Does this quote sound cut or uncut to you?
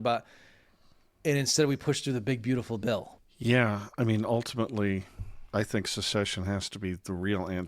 cut